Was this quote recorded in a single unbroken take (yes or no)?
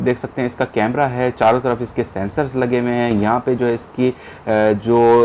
yes